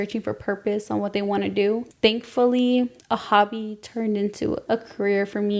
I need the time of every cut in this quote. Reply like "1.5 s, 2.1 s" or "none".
1.9 s, 3.0 s, 4.6 s